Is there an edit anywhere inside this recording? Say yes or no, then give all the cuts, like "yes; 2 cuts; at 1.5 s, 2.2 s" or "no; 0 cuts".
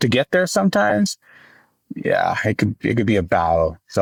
no; 0 cuts